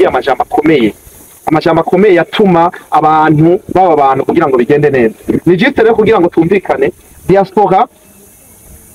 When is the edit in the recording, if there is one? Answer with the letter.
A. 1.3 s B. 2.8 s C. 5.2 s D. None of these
D